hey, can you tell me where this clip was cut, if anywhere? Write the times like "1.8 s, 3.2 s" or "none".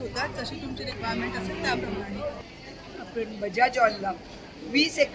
2.4 s

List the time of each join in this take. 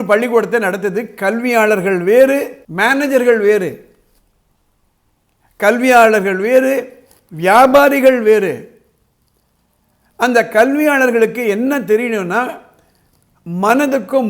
2.6 s

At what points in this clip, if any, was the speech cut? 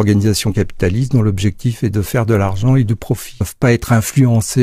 3.4 s

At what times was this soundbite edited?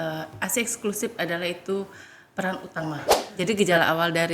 3.2 s

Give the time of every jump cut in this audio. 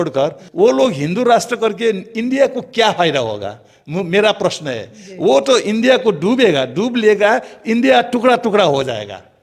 none

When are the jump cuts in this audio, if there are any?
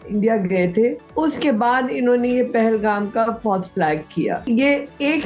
1.0 s, 4.4 s

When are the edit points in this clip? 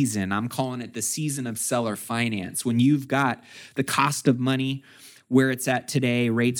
none

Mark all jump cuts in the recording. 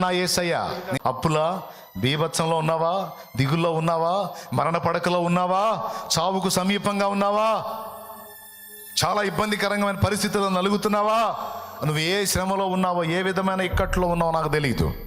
1.0 s

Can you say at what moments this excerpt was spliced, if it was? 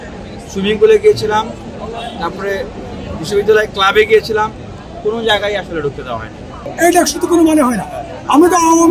6.6 s

